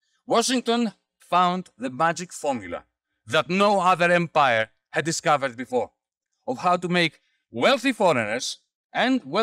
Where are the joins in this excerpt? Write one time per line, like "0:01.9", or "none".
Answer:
0:01.1